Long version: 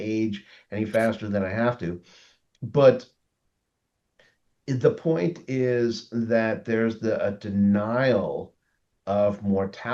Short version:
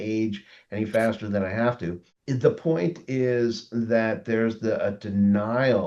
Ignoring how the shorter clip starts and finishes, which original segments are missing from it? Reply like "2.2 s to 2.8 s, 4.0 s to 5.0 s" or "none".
2.1 s to 4.5 s